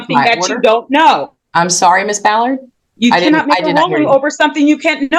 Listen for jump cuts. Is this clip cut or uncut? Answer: uncut